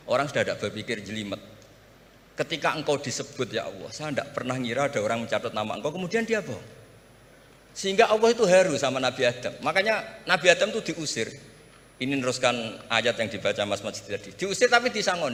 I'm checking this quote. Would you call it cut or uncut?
uncut